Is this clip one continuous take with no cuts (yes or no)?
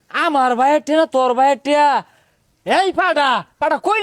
yes